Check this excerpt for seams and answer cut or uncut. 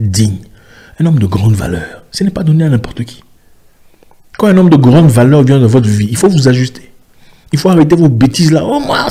uncut